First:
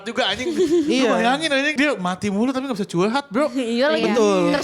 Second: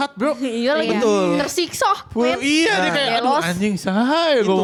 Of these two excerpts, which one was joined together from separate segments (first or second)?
first